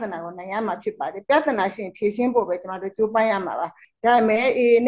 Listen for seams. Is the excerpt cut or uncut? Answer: cut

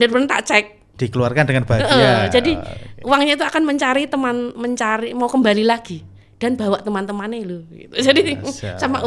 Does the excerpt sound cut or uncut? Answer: uncut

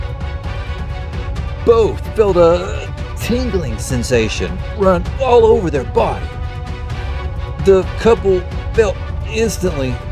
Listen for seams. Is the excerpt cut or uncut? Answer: cut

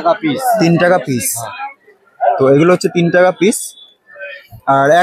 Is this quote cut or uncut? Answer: uncut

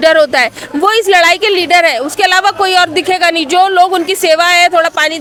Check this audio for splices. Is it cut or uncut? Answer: uncut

